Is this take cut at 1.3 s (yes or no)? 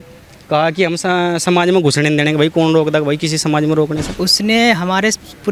no